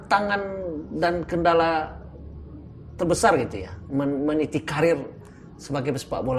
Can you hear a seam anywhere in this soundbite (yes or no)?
no